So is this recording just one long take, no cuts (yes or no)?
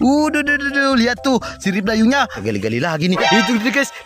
no